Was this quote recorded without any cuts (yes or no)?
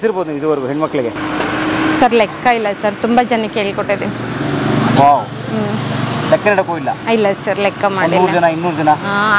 yes